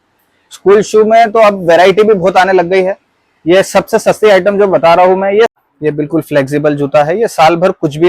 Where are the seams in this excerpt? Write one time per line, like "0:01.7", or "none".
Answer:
0:05.5